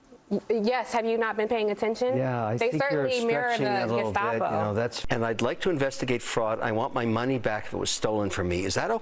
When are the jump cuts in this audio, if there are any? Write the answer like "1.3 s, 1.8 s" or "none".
5.0 s